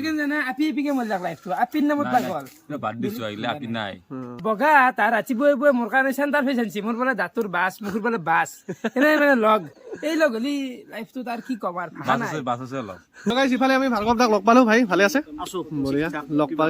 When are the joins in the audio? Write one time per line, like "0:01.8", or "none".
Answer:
0:04.4
0:13.3